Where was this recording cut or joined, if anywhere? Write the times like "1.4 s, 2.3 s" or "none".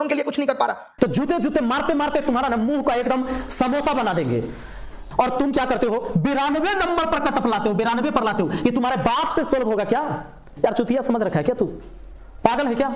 0.9 s, 5.0 s, 10.5 s